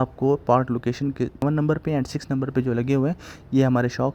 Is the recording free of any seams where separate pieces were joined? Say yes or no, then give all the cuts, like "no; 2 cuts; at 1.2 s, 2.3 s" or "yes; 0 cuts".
no; 1 cut; at 1.4 s